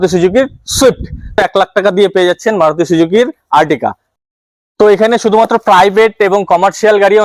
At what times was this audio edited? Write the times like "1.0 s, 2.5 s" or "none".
1.3 s, 4.1 s

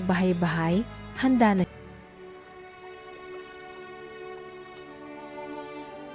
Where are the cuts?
1.7 s

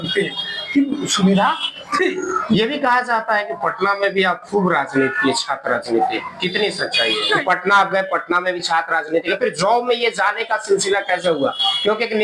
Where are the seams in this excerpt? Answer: 2.5 s, 7.4 s

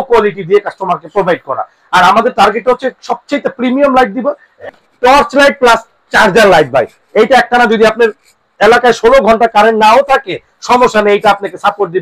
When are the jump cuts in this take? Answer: 4.7 s

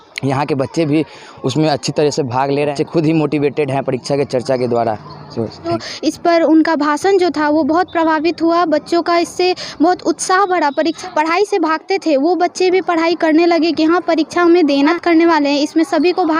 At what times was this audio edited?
2.7 s, 5.7 s, 11.0 s, 14.9 s

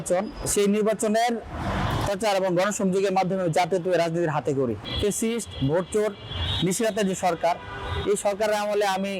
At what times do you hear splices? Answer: 4.8 s

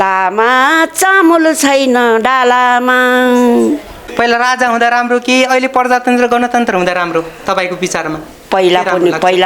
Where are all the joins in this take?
4.0 s

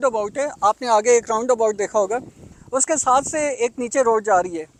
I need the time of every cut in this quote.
none

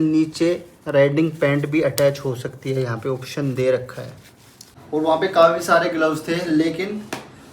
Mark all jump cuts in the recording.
4.7 s

